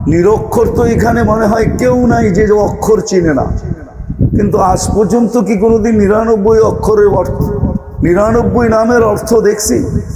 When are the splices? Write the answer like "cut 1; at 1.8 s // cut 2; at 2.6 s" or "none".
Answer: none